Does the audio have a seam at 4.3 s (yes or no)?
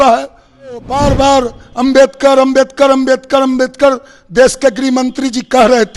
no